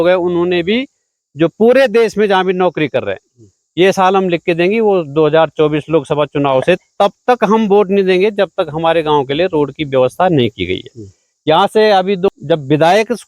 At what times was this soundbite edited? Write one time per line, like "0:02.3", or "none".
0:12.3